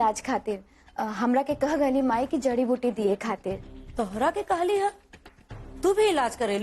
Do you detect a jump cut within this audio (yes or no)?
no